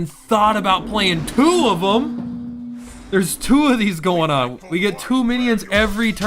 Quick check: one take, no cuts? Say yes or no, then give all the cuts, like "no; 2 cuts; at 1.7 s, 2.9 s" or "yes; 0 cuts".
yes; 0 cuts